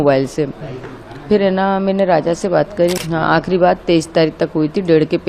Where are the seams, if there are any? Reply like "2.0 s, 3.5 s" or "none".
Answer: 3.0 s